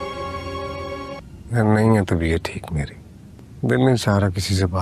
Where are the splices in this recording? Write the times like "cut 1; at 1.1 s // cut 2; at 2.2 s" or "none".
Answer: cut 1; at 1.2 s